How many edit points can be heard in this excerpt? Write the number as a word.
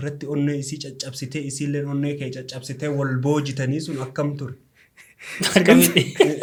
zero